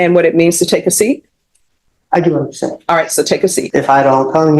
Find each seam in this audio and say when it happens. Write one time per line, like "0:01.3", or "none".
0:03.6